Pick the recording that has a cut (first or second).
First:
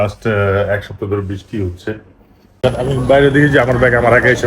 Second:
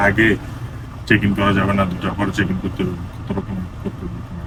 first